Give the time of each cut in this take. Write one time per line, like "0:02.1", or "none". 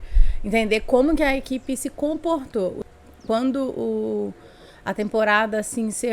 0:02.8